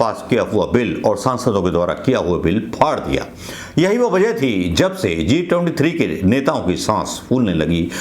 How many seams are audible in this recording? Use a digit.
0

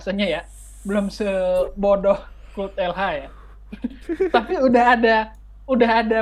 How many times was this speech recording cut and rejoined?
0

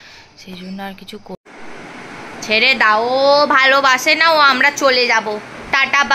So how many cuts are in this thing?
1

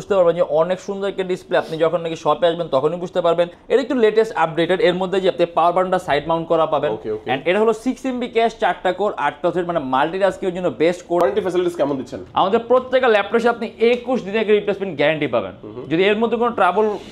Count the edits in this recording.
2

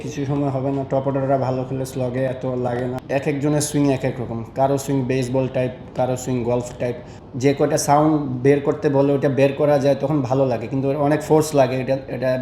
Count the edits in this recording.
2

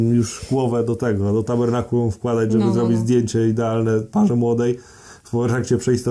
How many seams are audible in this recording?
0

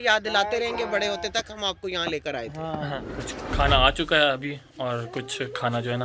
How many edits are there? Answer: 1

